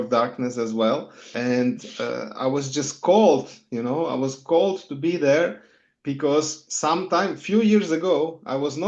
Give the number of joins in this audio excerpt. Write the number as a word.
one